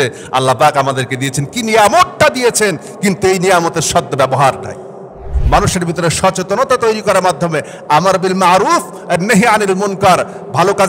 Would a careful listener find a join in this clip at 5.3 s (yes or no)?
yes